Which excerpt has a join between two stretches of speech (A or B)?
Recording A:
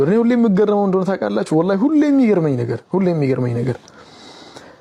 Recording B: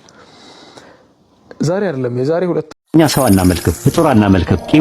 B